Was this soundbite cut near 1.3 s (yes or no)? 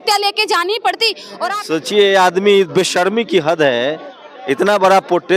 yes